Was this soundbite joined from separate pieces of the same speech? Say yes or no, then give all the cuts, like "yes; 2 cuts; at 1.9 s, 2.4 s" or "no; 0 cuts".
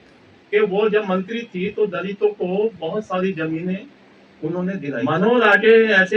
yes; 1 cut; at 4.9 s